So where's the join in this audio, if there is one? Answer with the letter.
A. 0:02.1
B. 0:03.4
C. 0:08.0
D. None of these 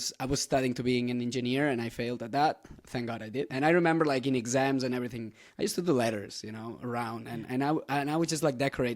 B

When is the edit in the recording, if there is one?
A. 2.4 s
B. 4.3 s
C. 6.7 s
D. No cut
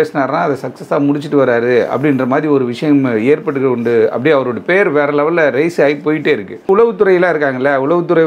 C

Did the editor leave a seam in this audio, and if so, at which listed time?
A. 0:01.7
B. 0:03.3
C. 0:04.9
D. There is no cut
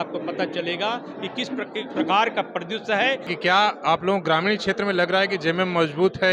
B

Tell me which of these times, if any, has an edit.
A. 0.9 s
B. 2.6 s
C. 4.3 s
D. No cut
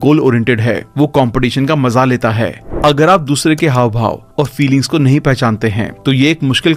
B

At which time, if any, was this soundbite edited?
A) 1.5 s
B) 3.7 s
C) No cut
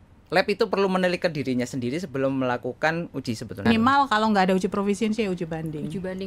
B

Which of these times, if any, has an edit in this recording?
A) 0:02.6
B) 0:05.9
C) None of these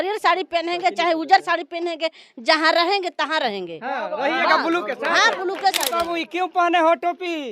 B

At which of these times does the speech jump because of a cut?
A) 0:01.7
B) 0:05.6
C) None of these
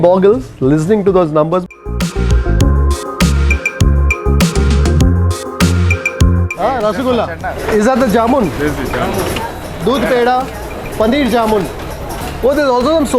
A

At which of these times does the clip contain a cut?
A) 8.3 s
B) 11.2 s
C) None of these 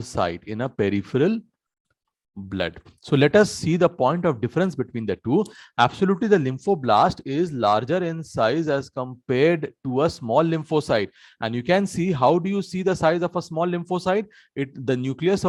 C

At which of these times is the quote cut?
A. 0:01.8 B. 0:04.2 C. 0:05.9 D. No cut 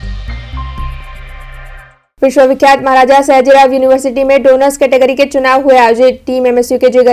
A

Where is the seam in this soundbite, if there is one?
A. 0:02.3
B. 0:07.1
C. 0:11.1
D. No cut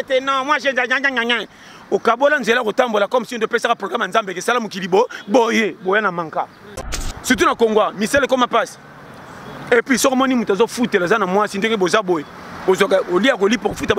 B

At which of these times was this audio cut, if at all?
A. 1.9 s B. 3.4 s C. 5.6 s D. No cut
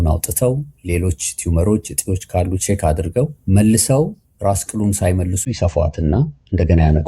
B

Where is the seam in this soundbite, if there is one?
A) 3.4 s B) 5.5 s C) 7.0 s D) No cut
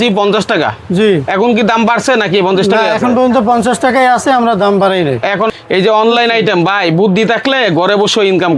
B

